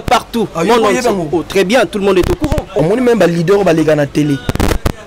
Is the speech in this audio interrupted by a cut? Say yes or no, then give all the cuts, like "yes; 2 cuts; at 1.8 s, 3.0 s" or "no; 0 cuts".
yes; 1 cut; at 2.7 s